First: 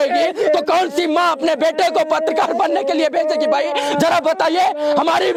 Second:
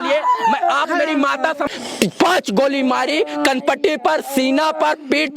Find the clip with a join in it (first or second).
second